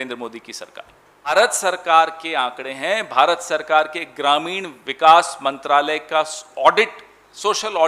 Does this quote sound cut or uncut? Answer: cut